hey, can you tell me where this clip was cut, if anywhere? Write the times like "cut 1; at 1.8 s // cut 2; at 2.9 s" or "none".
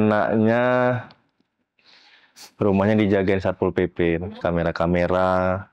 cut 1; at 4.2 s